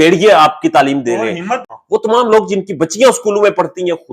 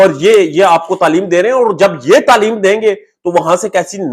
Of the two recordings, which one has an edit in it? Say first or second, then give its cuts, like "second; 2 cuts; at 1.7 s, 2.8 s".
first; 1 cut; at 1.6 s